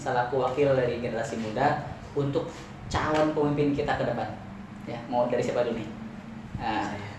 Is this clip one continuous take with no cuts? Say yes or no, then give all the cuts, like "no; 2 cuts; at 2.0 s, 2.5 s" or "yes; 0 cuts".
yes; 0 cuts